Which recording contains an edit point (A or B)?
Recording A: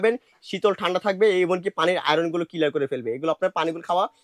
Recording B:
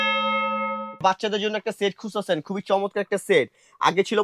B